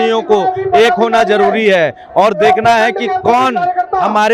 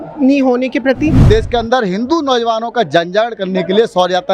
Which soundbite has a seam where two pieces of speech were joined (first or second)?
second